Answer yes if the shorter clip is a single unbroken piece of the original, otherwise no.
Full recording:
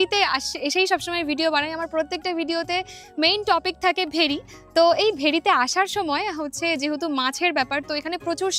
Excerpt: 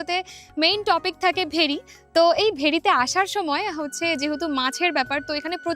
yes